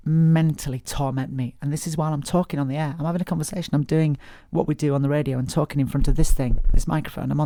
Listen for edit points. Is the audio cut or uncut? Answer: uncut